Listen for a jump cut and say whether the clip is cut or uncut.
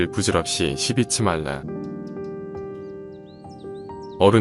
cut